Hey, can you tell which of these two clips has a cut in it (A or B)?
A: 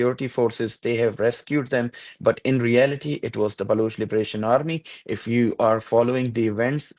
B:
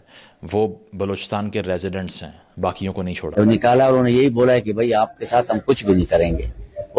B